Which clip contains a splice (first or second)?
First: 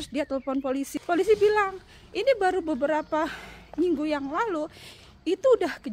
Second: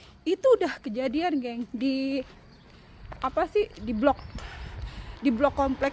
first